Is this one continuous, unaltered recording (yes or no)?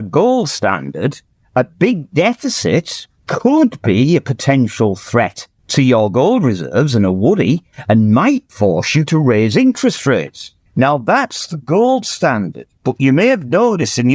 yes